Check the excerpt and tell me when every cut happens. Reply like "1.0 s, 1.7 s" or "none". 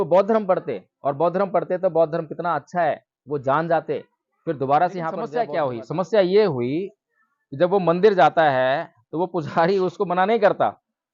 5.5 s